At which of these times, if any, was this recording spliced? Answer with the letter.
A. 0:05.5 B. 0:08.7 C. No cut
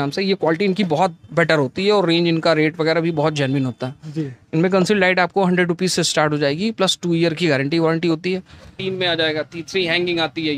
B